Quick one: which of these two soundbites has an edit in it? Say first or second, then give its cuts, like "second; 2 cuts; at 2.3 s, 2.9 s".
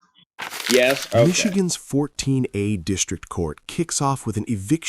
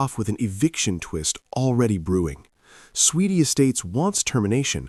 first; 1 cut; at 1.6 s